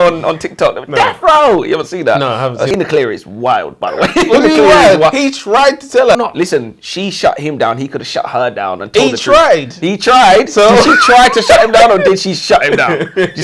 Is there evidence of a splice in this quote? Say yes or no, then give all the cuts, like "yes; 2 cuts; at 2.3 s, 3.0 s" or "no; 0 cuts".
yes; 2 cuts; at 2.8 s, 6.2 s